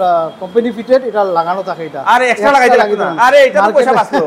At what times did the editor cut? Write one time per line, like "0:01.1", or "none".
none